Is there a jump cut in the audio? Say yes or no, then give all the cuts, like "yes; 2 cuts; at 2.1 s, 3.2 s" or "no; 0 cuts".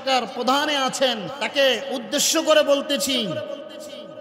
yes; 1 cut; at 1.4 s